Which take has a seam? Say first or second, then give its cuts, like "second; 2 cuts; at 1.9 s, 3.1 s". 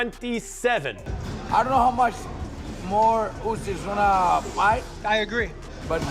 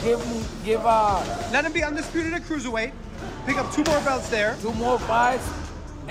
first; 1 cut; at 1.1 s